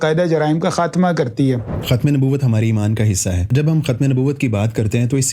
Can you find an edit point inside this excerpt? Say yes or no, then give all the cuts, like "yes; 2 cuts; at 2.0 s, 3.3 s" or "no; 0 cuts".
yes; 2 cuts; at 1.7 s, 3.5 s